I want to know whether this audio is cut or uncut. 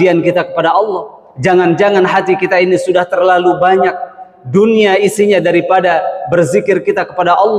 uncut